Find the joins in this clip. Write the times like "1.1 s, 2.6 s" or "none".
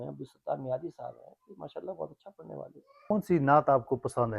3.1 s